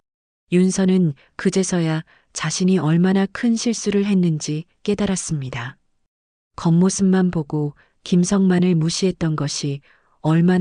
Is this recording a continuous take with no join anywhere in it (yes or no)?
yes